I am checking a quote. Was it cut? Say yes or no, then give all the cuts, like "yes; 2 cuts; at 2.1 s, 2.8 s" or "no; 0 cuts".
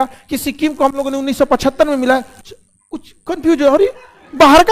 no; 0 cuts